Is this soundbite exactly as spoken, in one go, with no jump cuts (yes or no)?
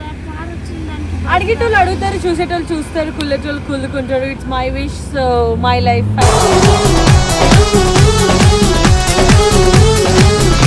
yes